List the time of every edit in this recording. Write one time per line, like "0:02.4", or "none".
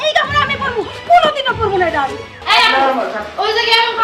0:02.3